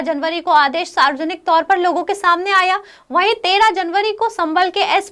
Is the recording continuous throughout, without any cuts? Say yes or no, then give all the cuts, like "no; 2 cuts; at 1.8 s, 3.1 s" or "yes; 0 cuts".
yes; 0 cuts